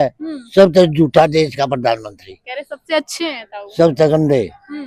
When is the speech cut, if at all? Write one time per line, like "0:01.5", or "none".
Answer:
none